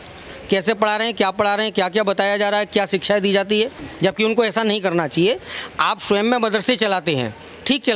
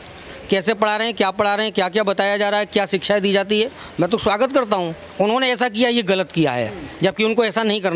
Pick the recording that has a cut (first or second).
first